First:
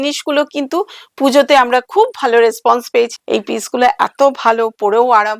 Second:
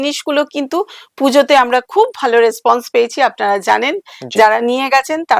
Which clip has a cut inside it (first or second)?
first